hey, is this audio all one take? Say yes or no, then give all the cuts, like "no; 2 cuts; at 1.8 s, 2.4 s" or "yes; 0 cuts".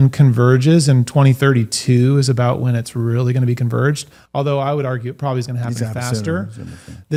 yes; 0 cuts